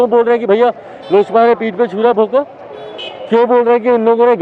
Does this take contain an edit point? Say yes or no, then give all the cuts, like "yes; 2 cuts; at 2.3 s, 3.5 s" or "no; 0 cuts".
no; 0 cuts